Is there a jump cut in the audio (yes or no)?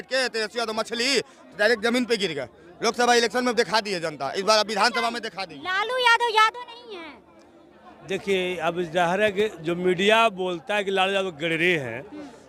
no